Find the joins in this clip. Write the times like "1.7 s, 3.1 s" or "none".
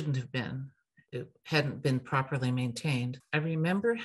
1.0 s, 3.1 s